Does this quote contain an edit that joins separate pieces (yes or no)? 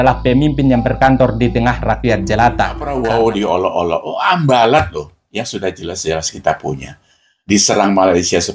yes